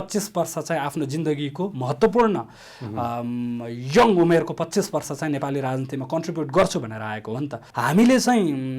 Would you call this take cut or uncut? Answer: cut